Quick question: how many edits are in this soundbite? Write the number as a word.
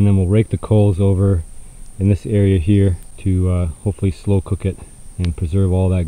one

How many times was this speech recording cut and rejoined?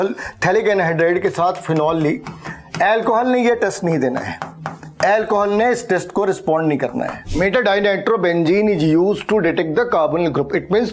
one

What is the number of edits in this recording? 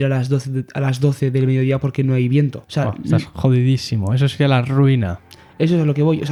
zero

